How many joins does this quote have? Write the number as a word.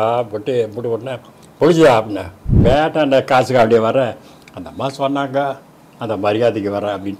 one